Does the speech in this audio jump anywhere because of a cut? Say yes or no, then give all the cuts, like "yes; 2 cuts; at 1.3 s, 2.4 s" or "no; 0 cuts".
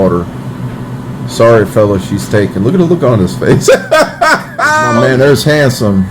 yes; 1 cut; at 4.9 s